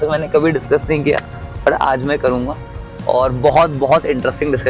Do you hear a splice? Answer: no; 0 cuts

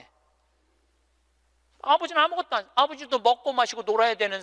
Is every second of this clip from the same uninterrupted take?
yes; 0 cuts

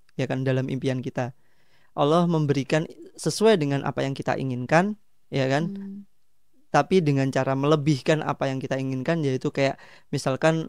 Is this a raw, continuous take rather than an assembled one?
yes; 0 cuts

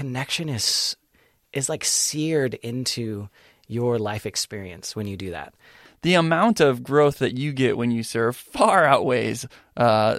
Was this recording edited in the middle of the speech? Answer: yes; 1 cut; at 5.8 s

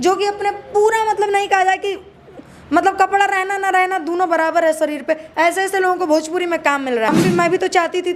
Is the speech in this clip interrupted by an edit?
yes; 1 cut; at 7.1 s

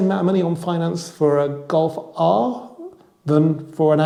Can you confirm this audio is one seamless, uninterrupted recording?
yes; 0 cuts

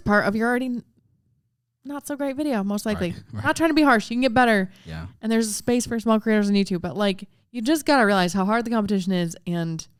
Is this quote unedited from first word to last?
yes; 0 cuts

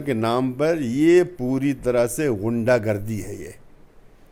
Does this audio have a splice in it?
no; 0 cuts

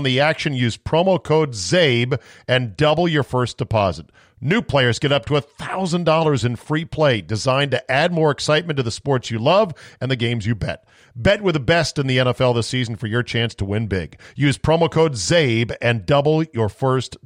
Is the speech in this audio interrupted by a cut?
no; 0 cuts

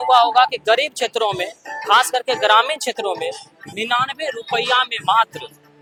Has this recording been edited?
no; 0 cuts

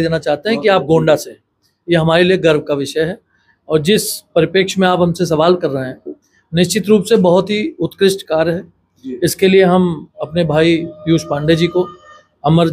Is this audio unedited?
yes; 0 cuts

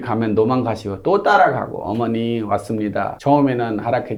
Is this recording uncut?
yes; 0 cuts

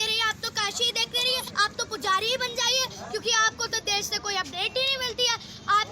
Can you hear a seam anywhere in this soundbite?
yes; 1 cut; at 1.5 s

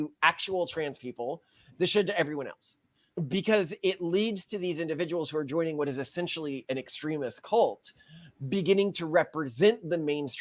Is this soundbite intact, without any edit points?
yes; 0 cuts

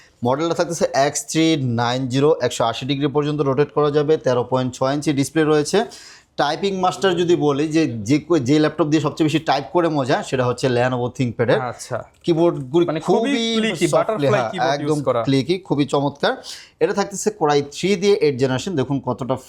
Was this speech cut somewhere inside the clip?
no; 0 cuts

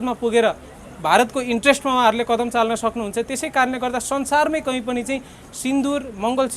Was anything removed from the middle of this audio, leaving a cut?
no; 0 cuts

